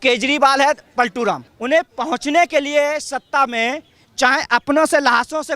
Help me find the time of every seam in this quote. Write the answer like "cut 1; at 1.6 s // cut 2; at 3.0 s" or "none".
cut 1; at 1.5 s